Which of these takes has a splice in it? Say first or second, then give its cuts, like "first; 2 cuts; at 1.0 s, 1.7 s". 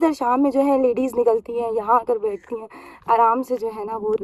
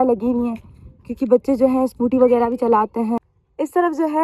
second; 1 cut; at 3.2 s